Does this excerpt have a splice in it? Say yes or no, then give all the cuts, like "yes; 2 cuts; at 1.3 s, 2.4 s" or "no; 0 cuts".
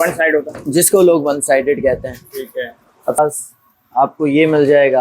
yes; 1 cut; at 3.2 s